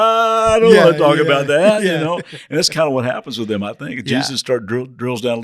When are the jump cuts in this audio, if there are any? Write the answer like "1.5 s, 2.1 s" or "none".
none

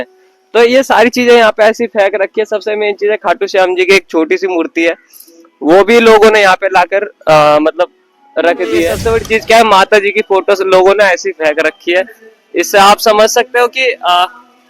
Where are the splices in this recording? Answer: 9.0 s

